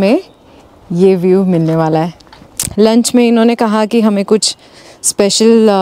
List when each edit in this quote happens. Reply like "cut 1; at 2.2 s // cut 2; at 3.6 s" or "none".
cut 1; at 2.6 s